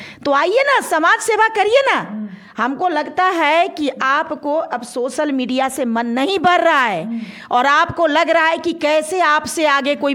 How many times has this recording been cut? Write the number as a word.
zero